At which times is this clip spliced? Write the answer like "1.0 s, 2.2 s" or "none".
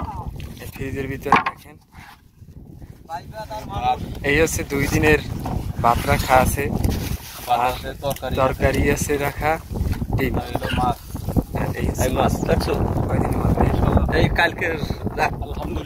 none